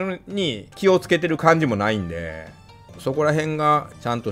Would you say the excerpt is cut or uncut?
cut